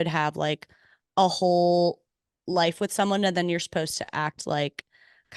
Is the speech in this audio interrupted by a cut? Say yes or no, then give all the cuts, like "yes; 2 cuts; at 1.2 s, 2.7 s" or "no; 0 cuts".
no; 0 cuts